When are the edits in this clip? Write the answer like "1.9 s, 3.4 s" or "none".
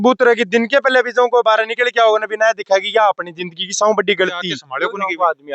4.6 s